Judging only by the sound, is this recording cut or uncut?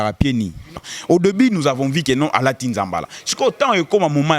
cut